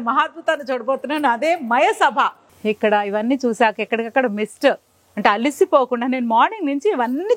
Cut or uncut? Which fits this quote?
cut